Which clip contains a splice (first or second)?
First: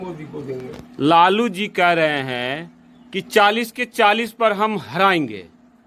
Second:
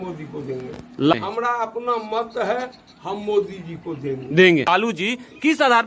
second